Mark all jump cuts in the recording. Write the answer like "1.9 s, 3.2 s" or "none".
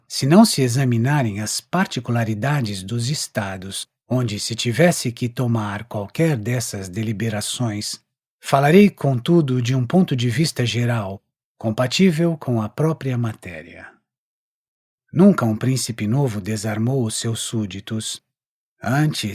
16.4 s